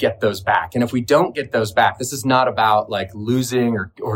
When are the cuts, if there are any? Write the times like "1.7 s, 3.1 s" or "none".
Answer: none